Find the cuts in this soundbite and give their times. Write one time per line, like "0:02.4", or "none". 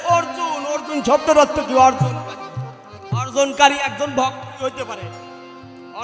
none